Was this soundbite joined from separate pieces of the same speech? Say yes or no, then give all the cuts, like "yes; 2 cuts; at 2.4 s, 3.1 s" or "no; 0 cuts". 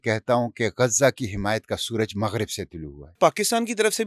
yes; 1 cut; at 3.2 s